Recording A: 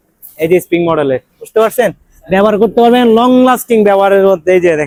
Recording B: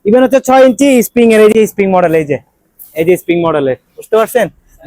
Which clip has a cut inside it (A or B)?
B